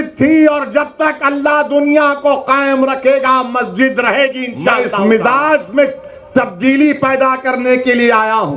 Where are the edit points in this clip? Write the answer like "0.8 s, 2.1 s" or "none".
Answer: 4.8 s